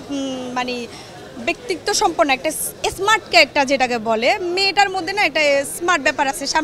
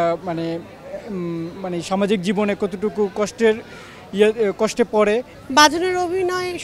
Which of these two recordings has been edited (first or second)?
second